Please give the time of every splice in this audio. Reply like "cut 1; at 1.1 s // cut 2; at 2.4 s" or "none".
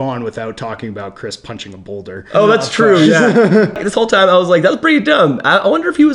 cut 1; at 3.8 s